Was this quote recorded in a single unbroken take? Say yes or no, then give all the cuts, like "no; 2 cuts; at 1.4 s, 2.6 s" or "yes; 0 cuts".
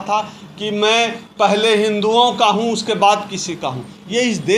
yes; 0 cuts